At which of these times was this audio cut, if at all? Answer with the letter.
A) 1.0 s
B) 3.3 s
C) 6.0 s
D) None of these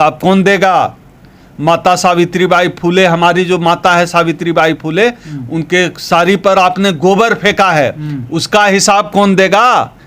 D